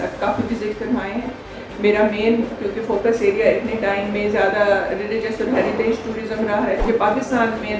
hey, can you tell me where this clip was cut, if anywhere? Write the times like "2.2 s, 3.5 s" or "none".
6.8 s